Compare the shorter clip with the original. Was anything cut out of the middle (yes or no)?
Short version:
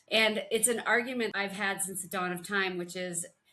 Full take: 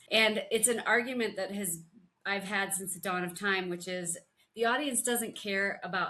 yes